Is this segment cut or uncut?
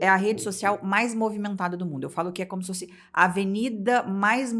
uncut